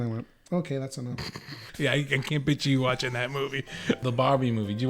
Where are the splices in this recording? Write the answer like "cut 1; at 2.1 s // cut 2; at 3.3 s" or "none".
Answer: cut 1; at 1.6 s // cut 2; at 4.0 s